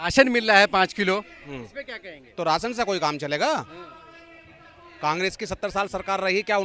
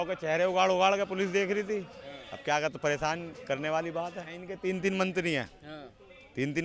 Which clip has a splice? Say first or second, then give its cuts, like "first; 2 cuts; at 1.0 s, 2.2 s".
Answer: second; 1 cut; at 4.5 s